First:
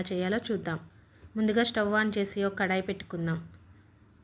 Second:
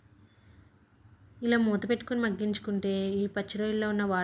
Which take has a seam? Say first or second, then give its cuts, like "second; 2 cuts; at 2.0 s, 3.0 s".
first; 1 cut; at 2.4 s